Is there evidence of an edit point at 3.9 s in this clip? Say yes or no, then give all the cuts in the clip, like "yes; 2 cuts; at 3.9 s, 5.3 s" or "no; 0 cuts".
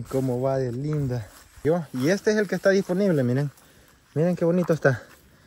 no; 1 cut; at 1.5 s